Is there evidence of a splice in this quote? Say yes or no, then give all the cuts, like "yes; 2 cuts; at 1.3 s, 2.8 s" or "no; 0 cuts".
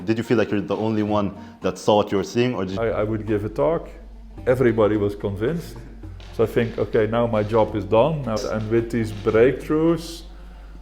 yes; 2 cuts; at 2.7 s, 8.4 s